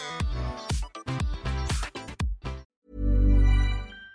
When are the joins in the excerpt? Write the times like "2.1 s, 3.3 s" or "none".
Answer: 2.6 s